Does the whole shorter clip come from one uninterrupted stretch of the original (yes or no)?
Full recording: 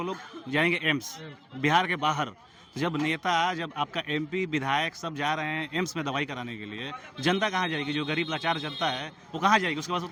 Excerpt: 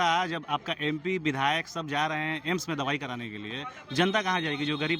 yes